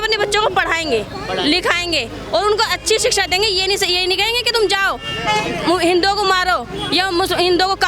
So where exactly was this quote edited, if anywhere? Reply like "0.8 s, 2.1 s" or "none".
none